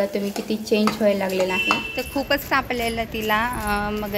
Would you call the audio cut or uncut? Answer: cut